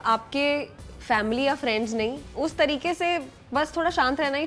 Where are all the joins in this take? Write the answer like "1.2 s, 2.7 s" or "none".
2.2 s

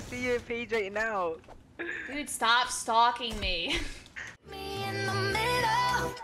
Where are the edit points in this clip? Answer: 4.7 s

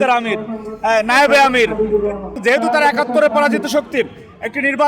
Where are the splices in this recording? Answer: 2.4 s

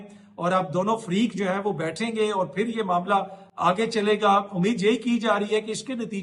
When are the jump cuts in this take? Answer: none

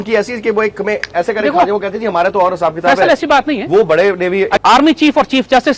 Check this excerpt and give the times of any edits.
4.6 s

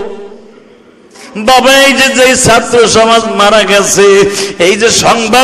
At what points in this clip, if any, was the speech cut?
1.3 s

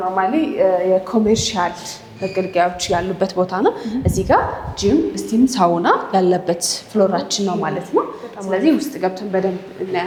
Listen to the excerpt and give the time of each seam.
none

